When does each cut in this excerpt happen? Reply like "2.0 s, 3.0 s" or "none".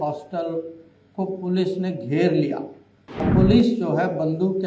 3.3 s